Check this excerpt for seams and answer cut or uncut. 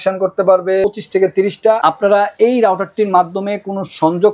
cut